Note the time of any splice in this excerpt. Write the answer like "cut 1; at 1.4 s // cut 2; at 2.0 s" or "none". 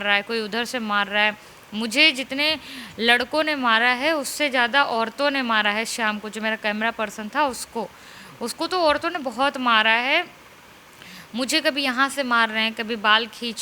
none